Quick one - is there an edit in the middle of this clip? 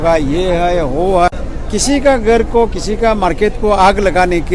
no; 0 cuts

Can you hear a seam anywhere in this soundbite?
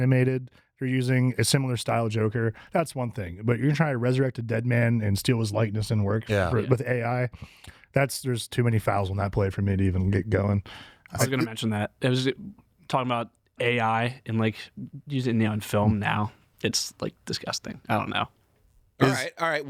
no; 0 cuts

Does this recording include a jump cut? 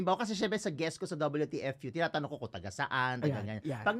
no; 0 cuts

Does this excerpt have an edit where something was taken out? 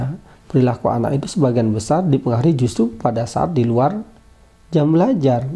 no; 0 cuts

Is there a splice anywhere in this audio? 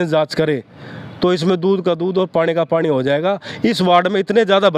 no; 0 cuts

